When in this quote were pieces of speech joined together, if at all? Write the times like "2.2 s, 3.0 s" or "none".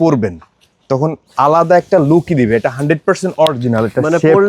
none